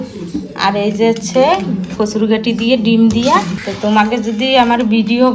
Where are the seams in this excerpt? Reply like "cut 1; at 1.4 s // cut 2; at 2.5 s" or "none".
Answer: cut 1; at 3.6 s